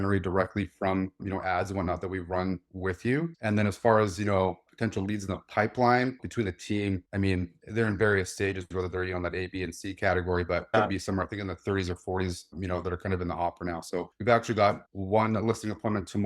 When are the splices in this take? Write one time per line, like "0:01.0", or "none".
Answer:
0:06.2
0:10.7